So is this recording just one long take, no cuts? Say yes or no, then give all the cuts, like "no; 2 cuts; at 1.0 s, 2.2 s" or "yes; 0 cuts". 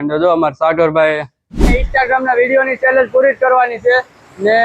no; 1 cut; at 1.8 s